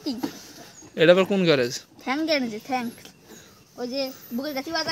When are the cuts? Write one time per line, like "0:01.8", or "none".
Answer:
none